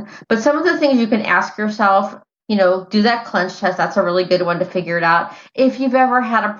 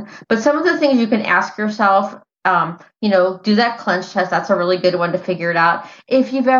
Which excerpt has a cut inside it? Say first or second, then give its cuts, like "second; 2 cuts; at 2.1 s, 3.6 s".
first; 1 cut; at 2.3 s